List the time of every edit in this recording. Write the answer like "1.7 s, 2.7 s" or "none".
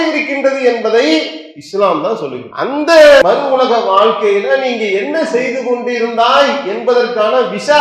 2.4 s, 3.2 s